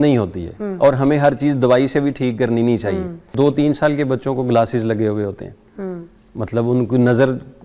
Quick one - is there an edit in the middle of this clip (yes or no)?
yes